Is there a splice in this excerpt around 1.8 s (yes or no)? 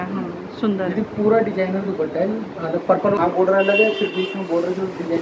no